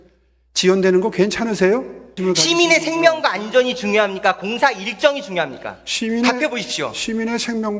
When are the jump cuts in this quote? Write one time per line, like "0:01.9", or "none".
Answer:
0:02.2